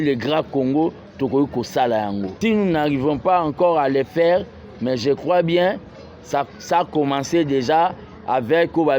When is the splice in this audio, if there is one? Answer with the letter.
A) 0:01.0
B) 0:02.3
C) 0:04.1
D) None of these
B